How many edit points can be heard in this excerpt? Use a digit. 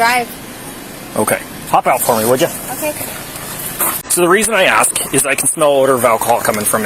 1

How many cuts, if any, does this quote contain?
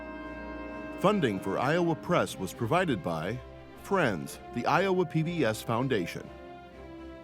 1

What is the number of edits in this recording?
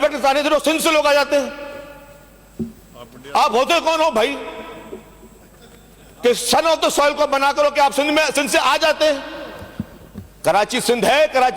0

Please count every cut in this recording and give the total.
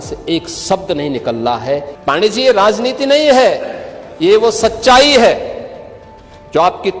1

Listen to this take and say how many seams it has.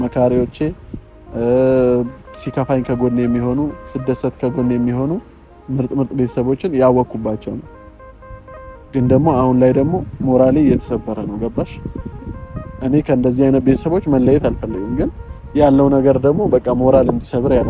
0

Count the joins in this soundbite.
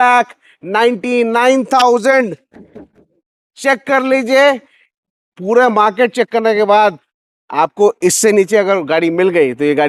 0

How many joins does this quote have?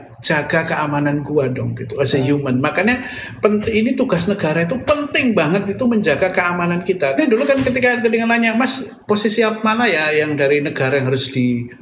1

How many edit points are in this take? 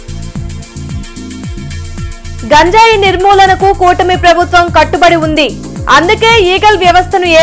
1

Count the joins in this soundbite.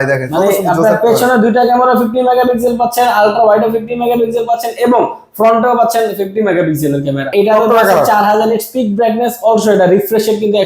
1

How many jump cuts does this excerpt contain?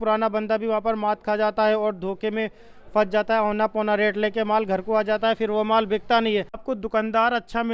1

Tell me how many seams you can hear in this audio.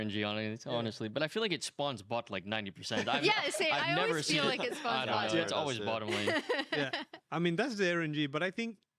1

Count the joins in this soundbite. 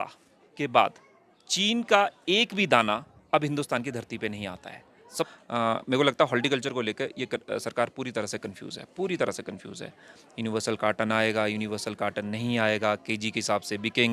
1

